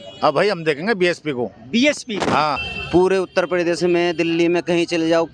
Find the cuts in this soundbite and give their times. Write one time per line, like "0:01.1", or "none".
0:02.7